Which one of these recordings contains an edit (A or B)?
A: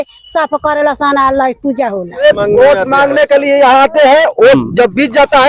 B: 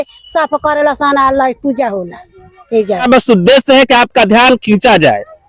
A